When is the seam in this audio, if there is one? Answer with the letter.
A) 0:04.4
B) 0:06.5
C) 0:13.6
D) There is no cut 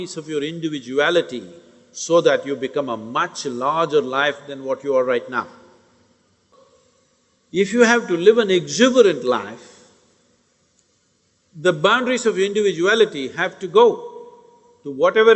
B